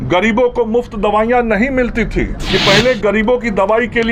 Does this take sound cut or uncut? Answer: cut